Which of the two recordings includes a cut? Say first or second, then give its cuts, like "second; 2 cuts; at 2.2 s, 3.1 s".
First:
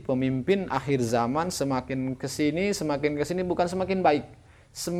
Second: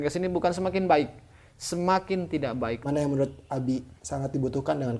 second; 2 cuts; at 2.8 s, 4.0 s